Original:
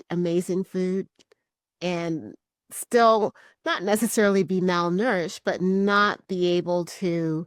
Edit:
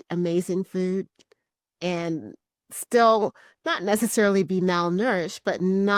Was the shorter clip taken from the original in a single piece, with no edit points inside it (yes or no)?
yes